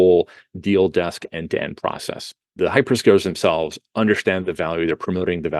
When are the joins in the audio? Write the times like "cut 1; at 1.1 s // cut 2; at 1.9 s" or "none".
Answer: cut 1; at 2.5 s